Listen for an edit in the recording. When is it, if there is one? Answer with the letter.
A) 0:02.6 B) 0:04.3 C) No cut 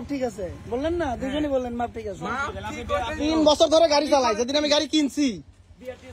C